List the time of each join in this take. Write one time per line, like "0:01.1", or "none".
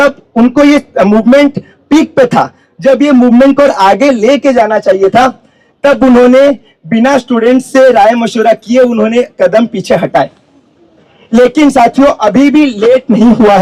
none